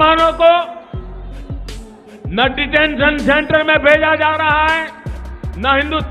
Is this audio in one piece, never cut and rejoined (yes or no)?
yes